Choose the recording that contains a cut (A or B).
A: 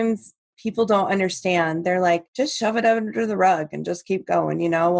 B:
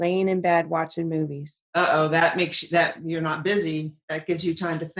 A